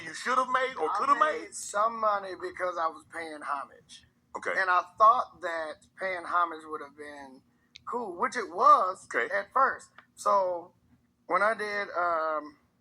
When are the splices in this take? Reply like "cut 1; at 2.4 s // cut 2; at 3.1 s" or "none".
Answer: cut 1; at 2.3 s